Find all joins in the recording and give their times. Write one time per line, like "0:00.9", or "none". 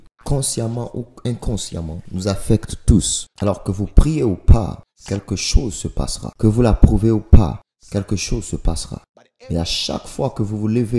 0:03.2
0:06.3